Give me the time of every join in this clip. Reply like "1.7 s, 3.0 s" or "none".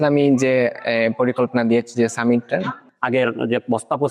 2.9 s

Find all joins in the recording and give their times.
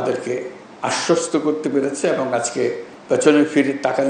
2.9 s

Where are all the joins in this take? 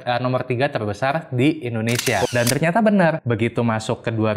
2.3 s, 3.2 s

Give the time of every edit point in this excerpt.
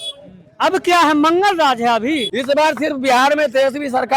2.3 s

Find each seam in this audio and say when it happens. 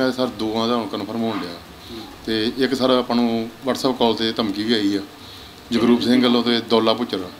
none

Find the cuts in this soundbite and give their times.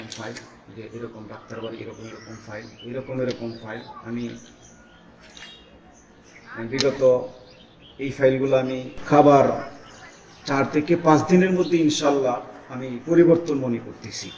8.9 s

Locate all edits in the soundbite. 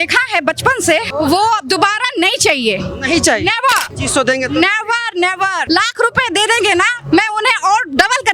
1.1 s, 3.9 s, 5.6 s

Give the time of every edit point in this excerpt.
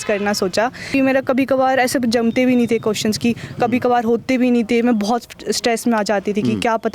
0.9 s

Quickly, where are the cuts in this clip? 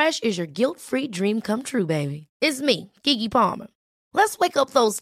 none

